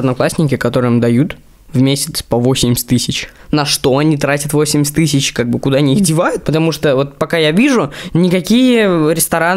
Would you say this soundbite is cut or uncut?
uncut